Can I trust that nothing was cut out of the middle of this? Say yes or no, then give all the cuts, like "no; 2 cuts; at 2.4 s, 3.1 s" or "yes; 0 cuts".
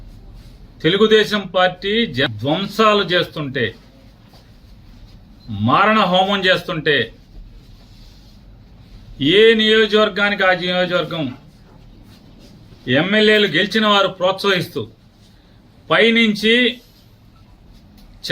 no; 1 cut; at 2.3 s